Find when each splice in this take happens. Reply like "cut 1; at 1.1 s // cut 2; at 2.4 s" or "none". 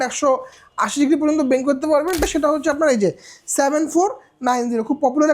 cut 1; at 2.2 s